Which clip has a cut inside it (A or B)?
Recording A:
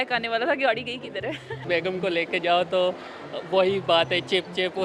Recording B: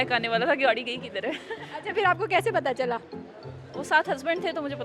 A